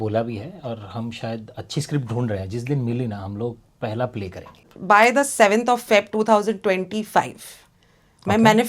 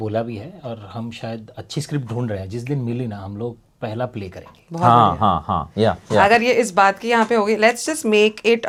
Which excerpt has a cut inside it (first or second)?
first